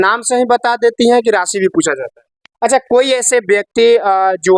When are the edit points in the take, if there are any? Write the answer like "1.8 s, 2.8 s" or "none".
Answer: 2.5 s